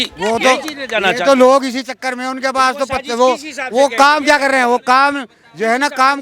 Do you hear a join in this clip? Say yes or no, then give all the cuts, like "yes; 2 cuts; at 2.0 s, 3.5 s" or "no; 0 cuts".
no; 0 cuts